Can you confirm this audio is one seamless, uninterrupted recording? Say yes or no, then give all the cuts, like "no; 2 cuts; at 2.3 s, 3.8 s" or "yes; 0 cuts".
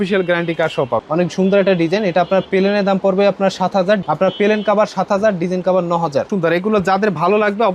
no; 3 cuts; at 1.0 s, 4.0 s, 6.3 s